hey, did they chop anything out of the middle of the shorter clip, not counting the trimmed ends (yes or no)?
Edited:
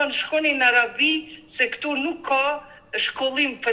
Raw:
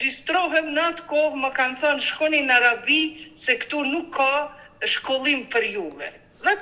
no